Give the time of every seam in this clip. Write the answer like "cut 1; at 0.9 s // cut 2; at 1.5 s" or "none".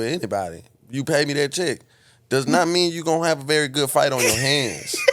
none